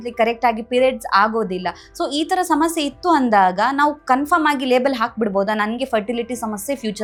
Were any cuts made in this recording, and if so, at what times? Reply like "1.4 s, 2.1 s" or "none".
none